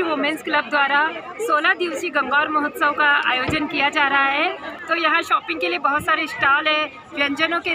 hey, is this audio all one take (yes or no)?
no